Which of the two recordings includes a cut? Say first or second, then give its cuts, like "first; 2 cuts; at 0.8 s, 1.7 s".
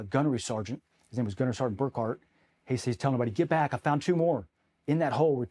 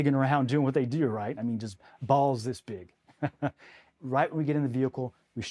second; 1 cut; at 3.9 s